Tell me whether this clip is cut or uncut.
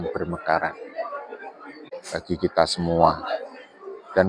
cut